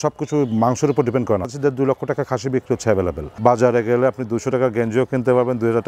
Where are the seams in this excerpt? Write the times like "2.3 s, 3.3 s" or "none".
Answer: 1.5 s, 3.3 s